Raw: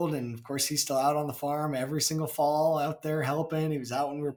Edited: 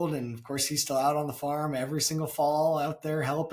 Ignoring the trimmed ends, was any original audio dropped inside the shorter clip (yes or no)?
no